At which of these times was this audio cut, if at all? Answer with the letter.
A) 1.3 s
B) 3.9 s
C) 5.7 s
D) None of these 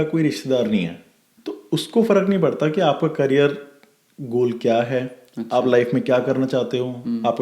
A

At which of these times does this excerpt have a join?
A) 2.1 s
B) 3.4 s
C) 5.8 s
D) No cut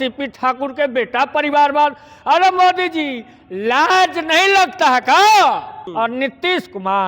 C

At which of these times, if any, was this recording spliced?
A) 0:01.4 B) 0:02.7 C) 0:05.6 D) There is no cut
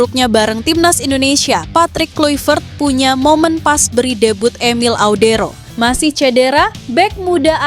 C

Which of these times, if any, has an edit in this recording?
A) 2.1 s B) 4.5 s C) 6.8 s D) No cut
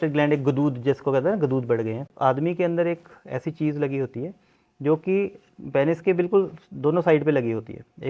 A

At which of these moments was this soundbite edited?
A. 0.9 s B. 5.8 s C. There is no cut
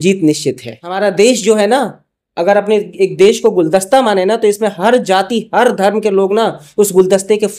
A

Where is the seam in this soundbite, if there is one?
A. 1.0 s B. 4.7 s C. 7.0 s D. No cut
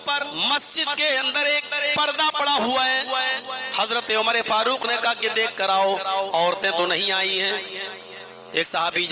D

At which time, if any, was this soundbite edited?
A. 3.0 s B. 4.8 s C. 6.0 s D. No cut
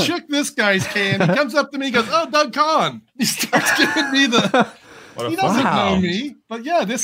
A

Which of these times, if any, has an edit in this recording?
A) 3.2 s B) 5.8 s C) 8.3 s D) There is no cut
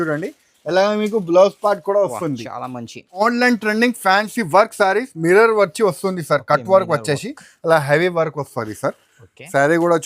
A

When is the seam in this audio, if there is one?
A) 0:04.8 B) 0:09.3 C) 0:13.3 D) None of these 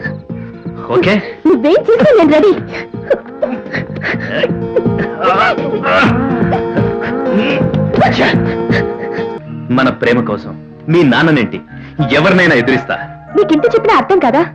B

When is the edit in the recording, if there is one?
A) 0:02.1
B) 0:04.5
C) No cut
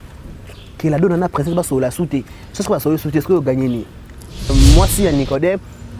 B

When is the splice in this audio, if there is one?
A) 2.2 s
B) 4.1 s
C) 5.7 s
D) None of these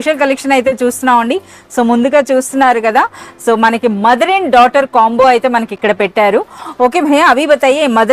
D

